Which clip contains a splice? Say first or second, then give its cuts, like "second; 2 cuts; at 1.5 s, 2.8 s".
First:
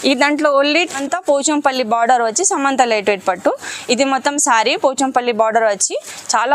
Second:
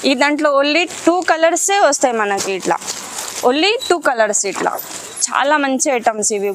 first; 1 cut; at 1.0 s